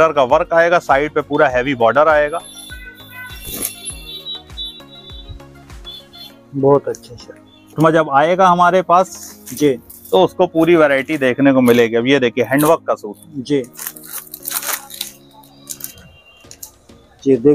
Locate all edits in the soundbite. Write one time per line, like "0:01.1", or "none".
none